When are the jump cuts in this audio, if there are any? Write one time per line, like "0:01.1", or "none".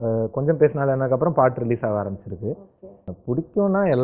0:02.6